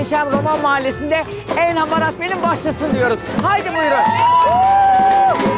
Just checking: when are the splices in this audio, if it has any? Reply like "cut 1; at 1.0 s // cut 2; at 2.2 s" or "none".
none